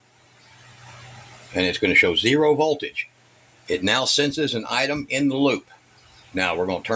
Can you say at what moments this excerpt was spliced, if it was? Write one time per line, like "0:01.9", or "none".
none